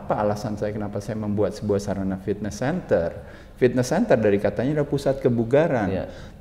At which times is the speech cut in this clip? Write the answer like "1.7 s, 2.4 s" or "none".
none